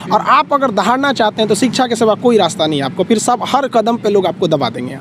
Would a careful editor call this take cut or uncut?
uncut